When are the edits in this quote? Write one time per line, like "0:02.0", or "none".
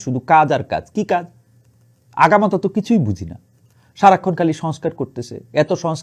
none